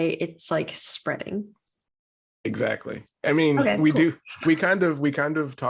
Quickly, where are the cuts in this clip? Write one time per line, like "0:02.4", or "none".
none